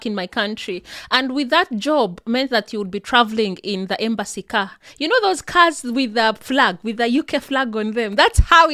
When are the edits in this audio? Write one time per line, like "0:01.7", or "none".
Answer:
none